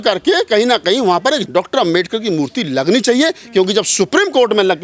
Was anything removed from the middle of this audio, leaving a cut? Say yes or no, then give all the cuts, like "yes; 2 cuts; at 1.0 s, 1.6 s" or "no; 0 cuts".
yes; 1 cut; at 1.5 s